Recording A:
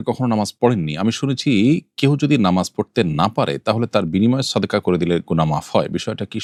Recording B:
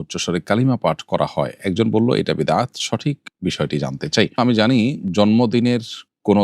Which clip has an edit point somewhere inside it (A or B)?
B